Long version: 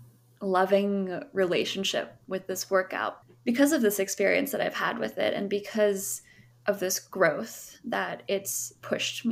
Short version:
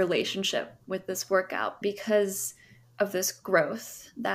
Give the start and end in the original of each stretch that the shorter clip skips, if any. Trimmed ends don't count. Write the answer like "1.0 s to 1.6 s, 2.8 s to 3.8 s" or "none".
3.2 s to 5.5 s